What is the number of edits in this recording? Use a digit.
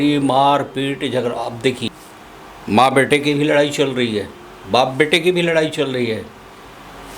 1